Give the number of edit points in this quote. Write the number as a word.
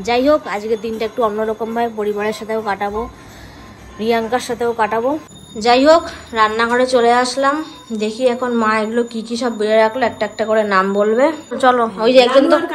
two